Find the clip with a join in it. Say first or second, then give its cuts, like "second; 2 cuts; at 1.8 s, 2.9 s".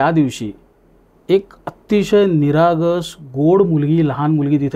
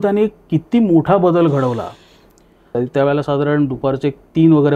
second; 1 cut; at 2.7 s